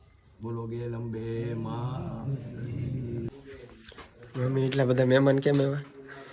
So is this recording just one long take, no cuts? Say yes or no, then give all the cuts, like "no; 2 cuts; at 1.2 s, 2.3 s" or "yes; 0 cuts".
no; 1 cut; at 3.3 s